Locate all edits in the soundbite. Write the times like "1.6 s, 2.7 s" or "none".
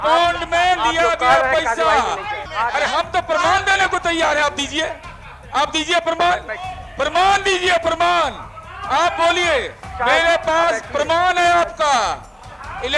2.4 s, 9.8 s